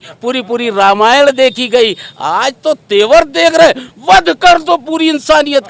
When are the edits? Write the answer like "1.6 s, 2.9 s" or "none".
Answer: none